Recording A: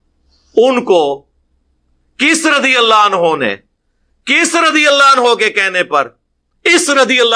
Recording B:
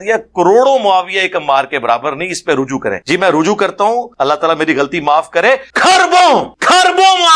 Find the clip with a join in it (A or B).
B